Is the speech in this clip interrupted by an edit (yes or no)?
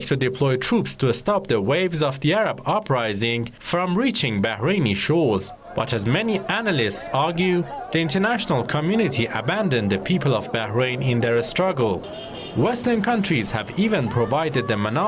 yes